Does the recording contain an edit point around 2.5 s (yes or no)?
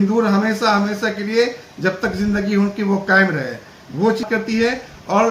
no